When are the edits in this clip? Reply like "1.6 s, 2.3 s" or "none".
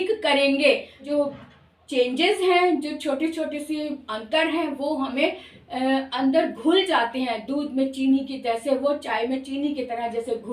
1.0 s